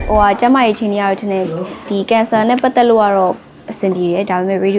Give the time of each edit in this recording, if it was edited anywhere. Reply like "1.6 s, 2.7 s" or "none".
1.8 s